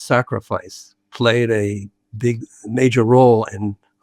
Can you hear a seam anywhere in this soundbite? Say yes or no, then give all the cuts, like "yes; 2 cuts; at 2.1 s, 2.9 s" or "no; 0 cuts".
no; 0 cuts